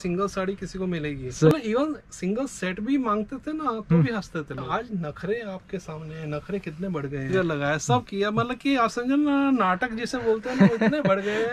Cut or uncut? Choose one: cut